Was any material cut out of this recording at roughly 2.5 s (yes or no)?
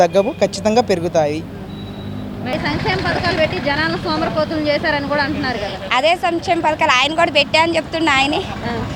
yes